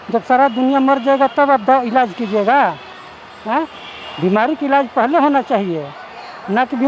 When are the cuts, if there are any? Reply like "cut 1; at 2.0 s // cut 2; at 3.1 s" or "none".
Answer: none